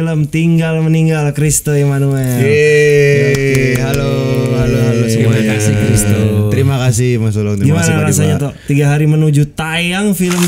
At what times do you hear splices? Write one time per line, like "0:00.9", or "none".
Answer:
none